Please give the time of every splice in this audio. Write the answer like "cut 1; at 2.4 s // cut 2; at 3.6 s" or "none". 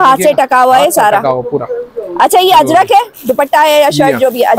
none